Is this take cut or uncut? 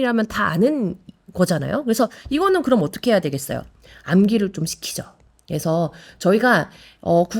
uncut